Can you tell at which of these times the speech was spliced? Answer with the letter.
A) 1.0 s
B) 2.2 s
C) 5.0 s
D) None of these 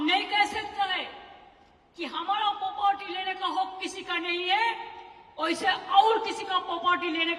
D